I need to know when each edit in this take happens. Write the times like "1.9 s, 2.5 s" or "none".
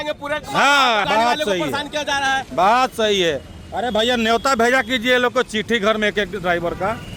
1.0 s